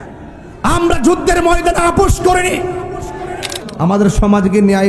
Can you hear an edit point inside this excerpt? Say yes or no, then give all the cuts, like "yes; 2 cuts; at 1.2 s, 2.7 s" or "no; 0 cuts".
yes; 1 cut; at 3.6 s